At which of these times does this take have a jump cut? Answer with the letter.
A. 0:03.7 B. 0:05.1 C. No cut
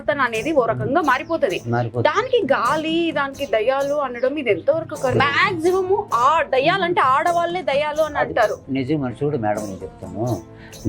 B